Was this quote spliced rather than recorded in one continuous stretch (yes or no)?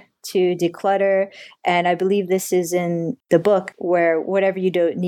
yes